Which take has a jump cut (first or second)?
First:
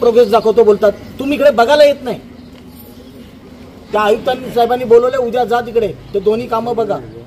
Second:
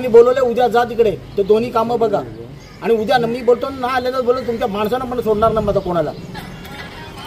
first